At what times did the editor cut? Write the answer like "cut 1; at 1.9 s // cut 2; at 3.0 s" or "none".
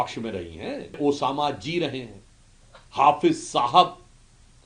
cut 1; at 1.0 s